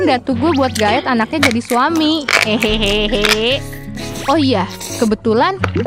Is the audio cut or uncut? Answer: uncut